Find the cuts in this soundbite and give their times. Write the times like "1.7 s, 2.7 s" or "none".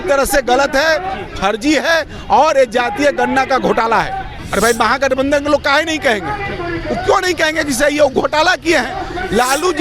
4.3 s